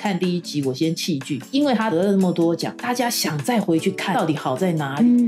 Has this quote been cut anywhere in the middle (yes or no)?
yes